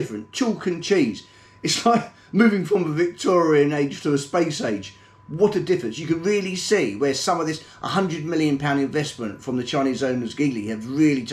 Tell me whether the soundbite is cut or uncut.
uncut